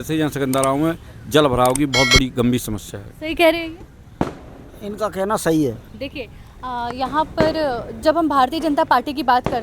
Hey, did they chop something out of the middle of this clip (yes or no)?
no